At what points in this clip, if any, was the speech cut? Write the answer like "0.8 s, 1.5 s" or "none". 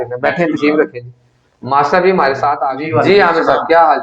2.7 s